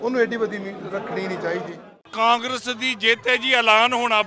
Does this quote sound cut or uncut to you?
cut